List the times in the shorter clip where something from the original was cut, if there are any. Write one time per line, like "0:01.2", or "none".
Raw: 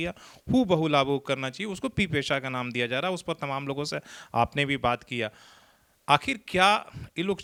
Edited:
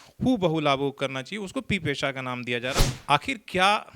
0:02.9